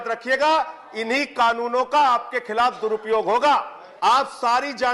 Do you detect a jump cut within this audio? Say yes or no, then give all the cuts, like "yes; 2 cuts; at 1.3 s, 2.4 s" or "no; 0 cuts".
yes; 1 cut; at 3.8 s